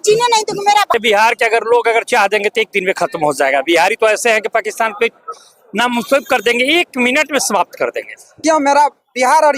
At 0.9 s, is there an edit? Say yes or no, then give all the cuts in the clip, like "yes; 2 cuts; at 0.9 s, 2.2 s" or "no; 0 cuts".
yes; 2 cuts; at 0.9 s, 8.4 s